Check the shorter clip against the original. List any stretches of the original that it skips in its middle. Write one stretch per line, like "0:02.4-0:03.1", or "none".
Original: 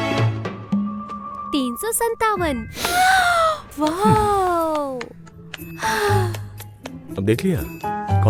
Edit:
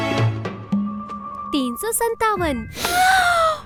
none